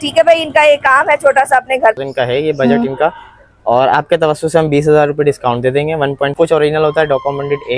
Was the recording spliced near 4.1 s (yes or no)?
no